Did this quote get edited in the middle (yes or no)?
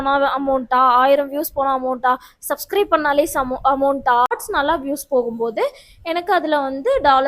yes